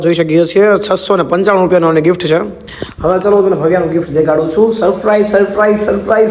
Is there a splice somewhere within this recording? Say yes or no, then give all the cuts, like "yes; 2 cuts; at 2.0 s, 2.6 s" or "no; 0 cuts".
no; 0 cuts